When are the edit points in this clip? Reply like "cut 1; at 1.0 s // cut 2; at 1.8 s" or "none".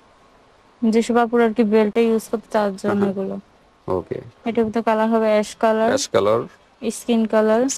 none

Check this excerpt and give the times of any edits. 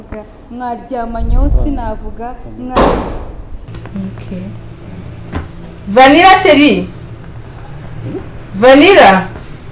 cut 1; at 3.7 s

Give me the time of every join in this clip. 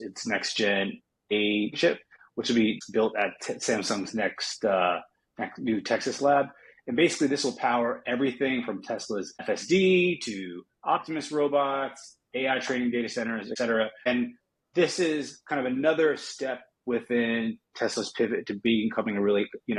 none

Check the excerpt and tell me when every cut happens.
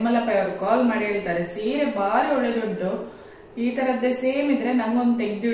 none

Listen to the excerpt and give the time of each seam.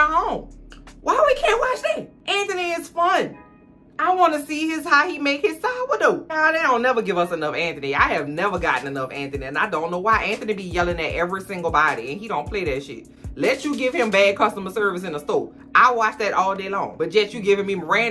cut 1; at 6.3 s

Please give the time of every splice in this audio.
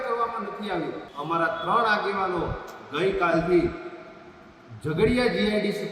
cut 1; at 1.1 s

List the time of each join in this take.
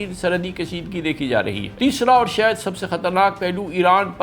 cut 1; at 1.6 s

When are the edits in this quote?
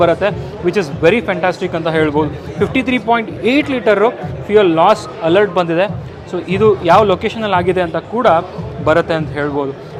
none

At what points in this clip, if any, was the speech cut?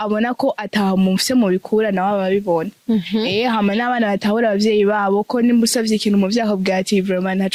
none

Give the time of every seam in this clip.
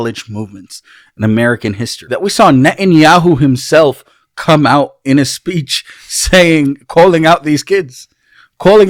cut 1; at 1.9 s

